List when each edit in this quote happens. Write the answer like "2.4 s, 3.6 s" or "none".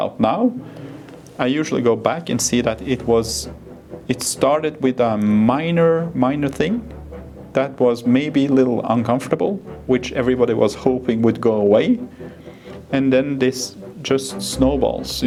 none